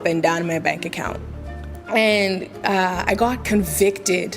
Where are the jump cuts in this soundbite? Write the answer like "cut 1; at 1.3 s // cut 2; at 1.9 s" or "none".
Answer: cut 1; at 1.7 s